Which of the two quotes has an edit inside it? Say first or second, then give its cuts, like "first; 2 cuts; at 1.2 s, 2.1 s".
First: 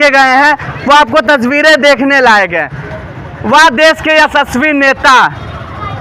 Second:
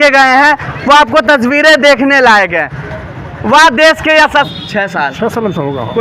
second; 1 cut; at 4.5 s